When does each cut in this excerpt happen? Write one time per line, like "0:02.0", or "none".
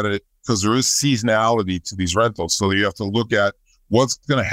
none

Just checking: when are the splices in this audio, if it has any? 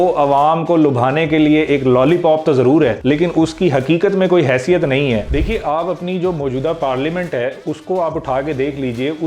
0:05.2

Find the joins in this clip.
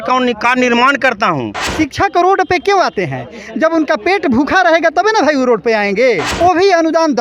0:01.7
0:06.3

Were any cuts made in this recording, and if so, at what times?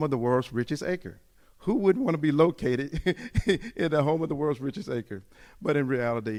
none

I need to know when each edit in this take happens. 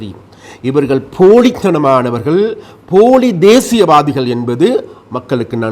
none

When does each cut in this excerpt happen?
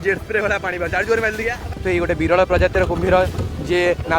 0:01.7

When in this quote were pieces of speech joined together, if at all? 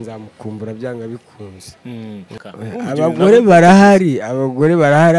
0:02.3

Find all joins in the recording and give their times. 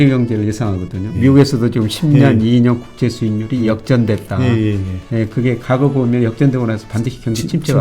0:01.1

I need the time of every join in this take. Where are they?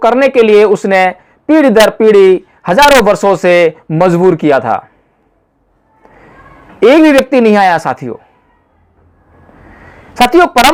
none

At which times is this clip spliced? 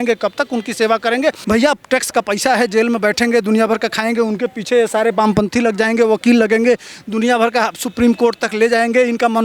0:01.4

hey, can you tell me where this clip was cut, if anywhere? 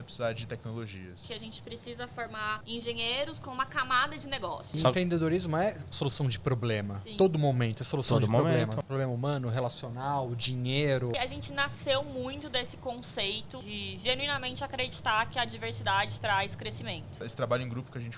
0:01.2
0:02.6
0:04.7
0:08.8
0:11.1
0:13.6
0:17.3

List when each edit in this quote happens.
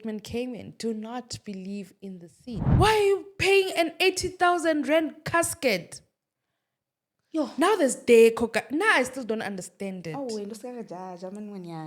0:02.7

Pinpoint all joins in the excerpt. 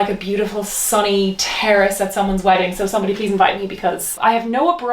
none

